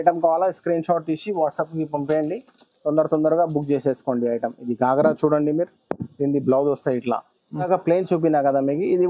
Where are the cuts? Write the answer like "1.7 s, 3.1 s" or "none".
7.6 s